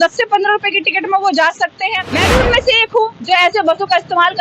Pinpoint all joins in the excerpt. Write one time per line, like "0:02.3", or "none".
0:02.0